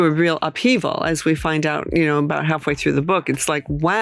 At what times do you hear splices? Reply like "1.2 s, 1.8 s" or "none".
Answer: none